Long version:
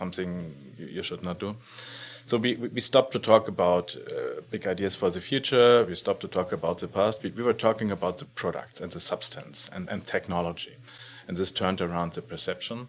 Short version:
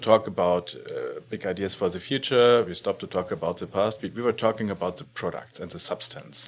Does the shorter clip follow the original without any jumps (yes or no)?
yes